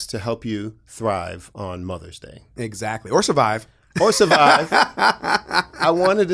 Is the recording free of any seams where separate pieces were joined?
yes; 0 cuts

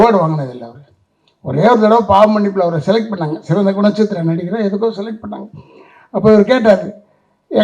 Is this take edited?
no; 0 cuts

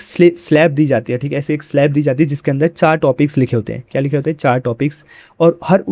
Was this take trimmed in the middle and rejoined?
no; 0 cuts

